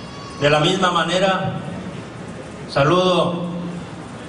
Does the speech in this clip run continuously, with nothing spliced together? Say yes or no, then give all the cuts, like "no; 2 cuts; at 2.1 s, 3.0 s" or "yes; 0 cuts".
yes; 0 cuts